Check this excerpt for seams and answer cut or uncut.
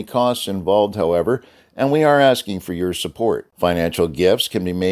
uncut